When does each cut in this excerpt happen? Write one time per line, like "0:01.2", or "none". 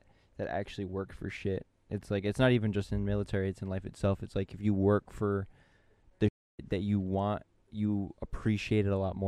none